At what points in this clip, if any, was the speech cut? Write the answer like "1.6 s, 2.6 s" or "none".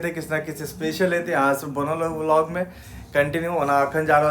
none